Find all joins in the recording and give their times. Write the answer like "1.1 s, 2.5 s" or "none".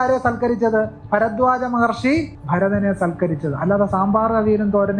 2.4 s